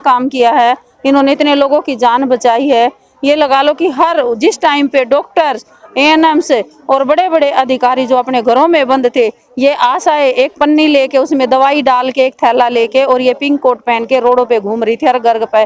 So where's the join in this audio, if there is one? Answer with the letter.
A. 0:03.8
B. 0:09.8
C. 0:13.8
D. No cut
D